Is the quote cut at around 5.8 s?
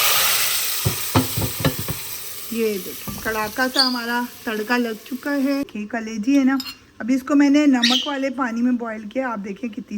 yes; 1 cut; at 5.8 s

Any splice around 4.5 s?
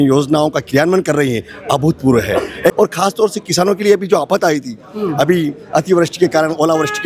no; 1 cut; at 2.7 s

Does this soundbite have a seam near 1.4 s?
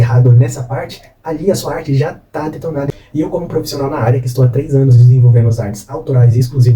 no; 1 cut; at 2.9 s

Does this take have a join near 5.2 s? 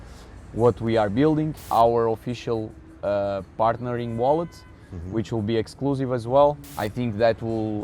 no; 2 cuts; at 1.6 s, 6.7 s

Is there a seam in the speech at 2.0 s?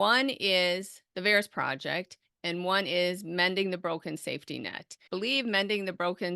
no; 1 cut; at 4.9 s

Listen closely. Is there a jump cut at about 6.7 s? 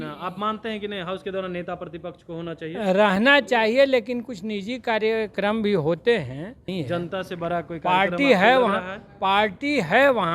yes; 1 cut; at 6.7 s

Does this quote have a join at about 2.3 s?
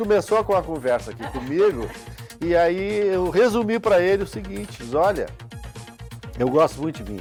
no; 0 cuts

